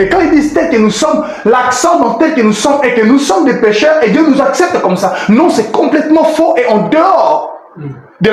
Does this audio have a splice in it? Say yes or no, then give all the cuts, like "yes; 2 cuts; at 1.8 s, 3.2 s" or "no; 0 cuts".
no; 0 cuts